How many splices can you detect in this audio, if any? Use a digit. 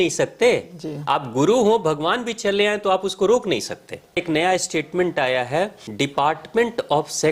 2